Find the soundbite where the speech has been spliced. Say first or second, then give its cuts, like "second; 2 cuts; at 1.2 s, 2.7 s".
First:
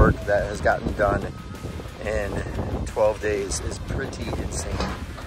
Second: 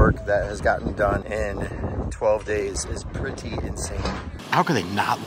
second; 2 cuts; at 1.2 s, 4.3 s